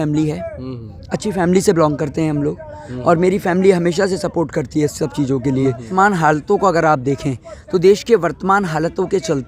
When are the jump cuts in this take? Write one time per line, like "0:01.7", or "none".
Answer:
0:05.8